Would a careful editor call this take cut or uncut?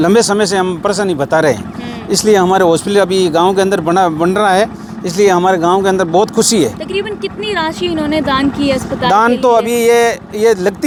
uncut